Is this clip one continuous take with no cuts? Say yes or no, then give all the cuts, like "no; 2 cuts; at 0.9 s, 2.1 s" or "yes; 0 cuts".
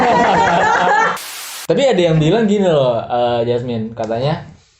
no; 1 cut; at 1.1 s